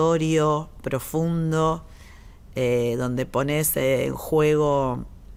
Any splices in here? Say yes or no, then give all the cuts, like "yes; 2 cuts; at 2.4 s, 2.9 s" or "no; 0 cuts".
no; 0 cuts